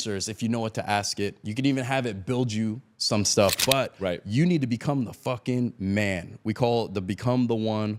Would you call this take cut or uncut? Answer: uncut